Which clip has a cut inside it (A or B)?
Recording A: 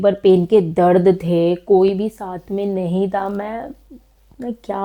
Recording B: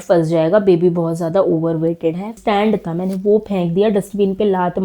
B